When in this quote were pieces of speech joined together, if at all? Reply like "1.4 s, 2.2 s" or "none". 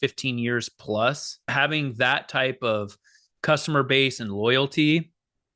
1.4 s